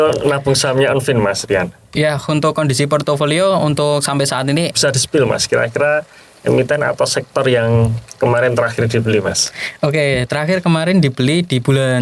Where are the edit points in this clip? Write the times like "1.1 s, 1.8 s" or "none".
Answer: 4.7 s